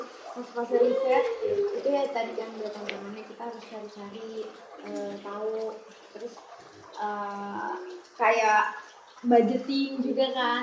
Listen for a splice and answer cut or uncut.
uncut